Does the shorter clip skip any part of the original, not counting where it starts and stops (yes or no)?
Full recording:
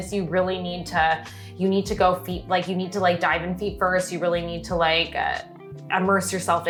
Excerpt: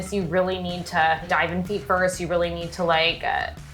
yes